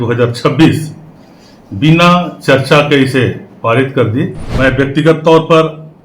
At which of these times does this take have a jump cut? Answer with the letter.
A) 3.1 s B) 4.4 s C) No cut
B